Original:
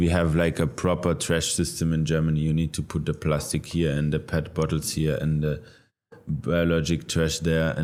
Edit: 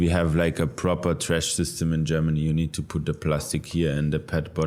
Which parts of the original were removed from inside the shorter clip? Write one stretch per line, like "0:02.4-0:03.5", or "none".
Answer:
none

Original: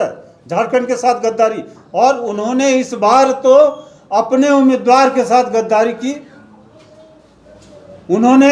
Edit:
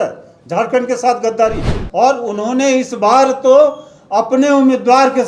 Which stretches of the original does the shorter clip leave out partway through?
none

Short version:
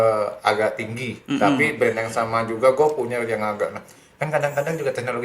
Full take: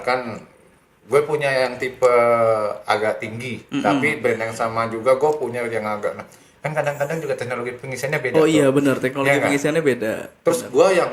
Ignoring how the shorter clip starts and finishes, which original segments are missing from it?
none

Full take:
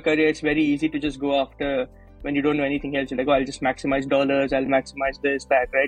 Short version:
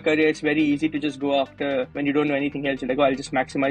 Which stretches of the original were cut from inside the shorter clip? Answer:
0:01.9-0:02.2

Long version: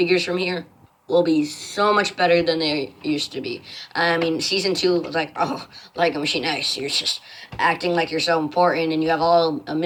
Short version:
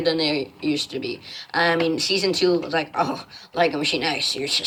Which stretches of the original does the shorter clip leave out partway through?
none

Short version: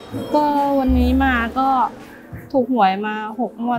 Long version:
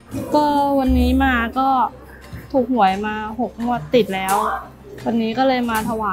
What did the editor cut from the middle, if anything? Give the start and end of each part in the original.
none

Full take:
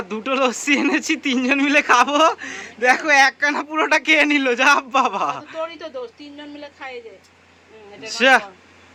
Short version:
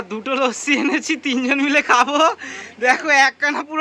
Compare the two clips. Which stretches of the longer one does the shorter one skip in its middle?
none

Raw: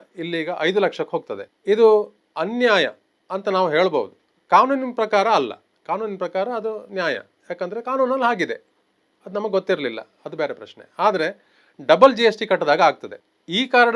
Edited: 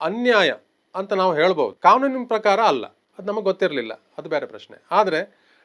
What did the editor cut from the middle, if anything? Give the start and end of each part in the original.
0:04.1-0:04.4
0:05.7-0:09.1

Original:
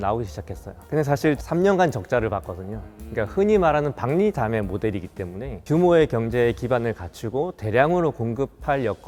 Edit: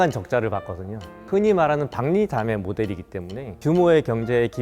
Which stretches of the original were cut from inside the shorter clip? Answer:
0:03.0-0:03.2

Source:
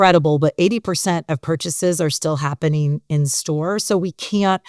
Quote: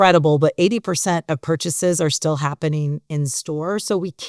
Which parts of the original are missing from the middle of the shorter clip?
none

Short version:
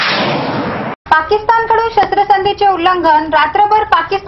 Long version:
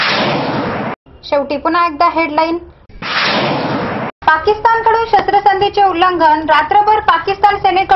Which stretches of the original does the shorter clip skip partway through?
0:01.0-0:04.1

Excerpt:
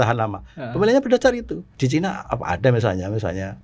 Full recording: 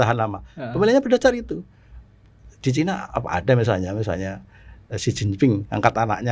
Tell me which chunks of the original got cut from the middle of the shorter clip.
0:01.6-0:02.4

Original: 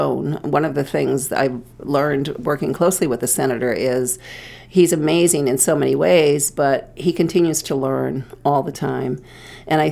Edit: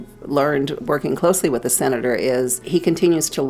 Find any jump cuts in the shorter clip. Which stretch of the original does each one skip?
0:04.2-0:06.9

